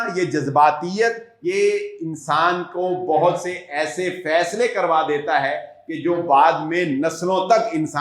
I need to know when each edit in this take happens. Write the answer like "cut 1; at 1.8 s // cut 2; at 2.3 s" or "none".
cut 1; at 1.3 s